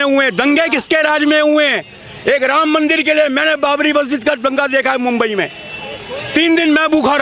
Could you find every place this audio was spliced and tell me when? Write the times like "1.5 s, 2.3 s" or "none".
none